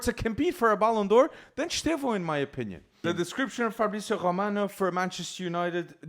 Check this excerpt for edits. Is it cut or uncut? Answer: cut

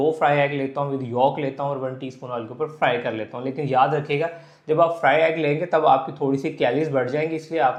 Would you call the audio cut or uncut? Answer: uncut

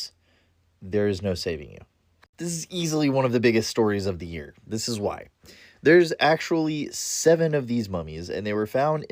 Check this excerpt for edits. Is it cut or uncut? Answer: uncut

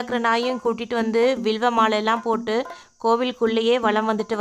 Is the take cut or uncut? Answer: uncut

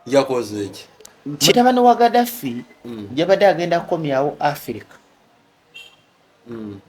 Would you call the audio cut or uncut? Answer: cut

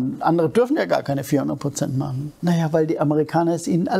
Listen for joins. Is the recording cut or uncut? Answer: cut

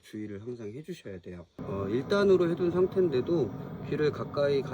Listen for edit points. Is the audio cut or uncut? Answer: cut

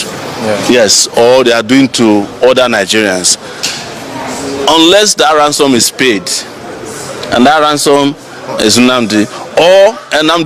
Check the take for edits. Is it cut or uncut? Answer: uncut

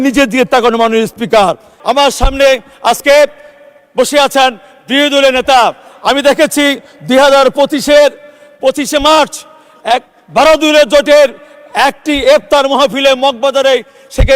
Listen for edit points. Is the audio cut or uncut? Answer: cut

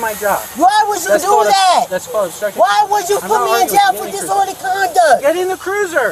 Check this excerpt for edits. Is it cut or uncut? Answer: uncut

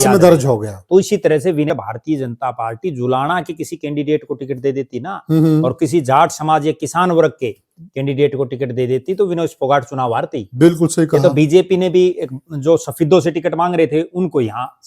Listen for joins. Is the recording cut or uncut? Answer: cut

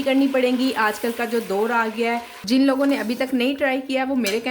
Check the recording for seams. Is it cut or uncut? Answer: cut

